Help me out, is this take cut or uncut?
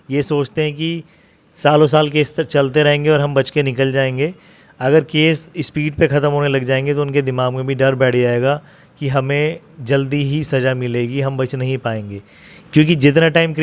uncut